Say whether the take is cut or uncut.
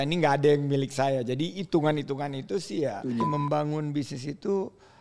cut